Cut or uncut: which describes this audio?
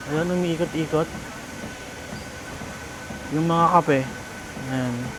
uncut